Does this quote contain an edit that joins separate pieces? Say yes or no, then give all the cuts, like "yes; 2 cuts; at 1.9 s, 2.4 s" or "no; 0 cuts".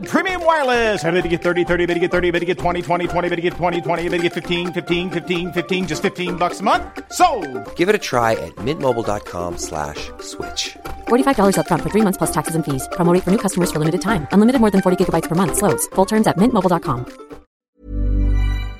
yes; 1 cut; at 17.6 s